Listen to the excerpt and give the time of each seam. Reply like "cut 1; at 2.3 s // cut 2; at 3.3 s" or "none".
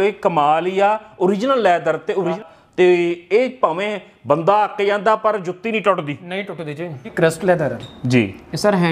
cut 1; at 2.4 s // cut 2; at 7.1 s